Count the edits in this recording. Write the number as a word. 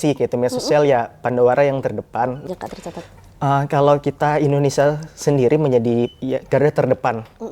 one